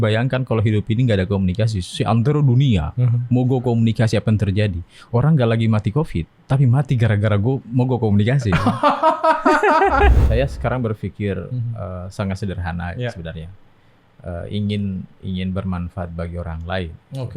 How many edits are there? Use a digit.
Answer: 1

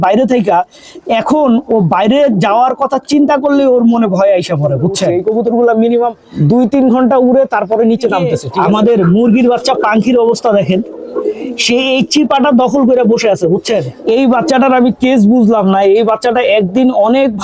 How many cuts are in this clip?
4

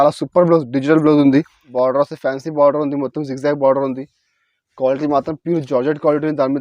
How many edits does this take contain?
1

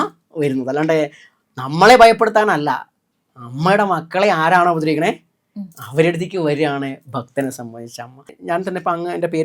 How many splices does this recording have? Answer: 1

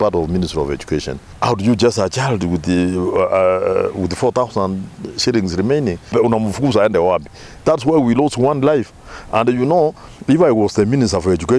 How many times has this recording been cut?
3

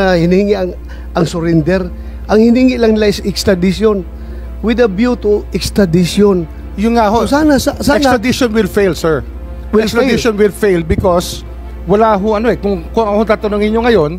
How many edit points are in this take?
0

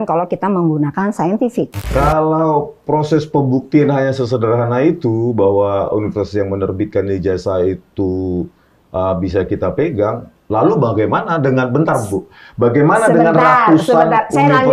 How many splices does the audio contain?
1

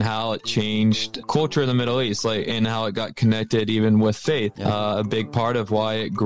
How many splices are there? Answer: 2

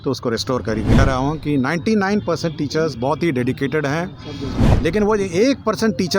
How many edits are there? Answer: 2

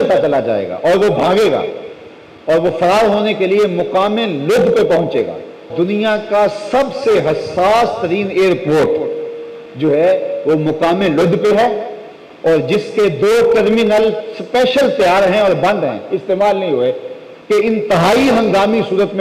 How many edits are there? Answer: 1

